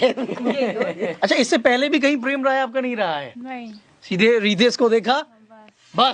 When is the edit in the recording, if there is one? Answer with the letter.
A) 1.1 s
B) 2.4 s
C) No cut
A